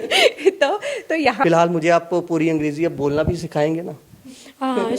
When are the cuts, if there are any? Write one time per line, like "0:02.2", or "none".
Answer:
0:01.4